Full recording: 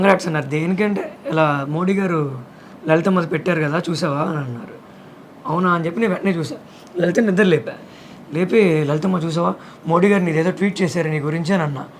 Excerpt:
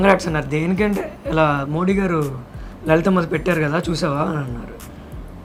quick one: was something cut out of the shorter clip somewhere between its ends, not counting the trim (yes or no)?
no